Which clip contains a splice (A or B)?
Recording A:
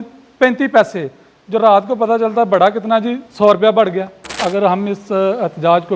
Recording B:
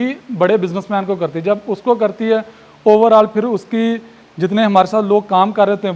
A